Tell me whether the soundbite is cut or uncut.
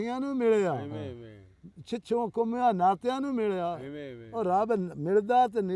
uncut